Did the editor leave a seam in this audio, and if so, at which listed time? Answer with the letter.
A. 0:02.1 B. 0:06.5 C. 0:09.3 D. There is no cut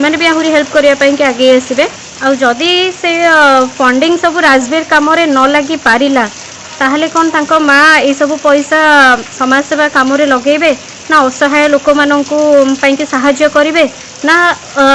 A